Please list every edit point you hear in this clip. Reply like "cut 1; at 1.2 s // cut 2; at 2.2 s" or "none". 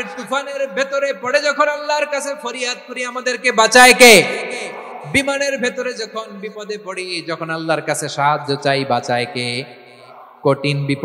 none